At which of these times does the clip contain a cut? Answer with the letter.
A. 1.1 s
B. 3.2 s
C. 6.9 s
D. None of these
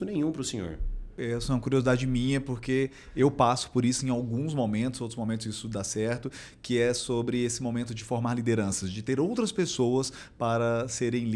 A